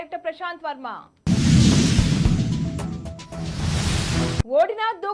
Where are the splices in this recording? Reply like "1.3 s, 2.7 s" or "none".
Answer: none